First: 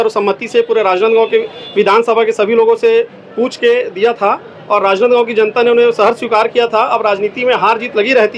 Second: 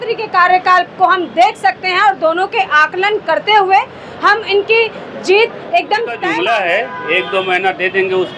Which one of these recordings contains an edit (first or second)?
second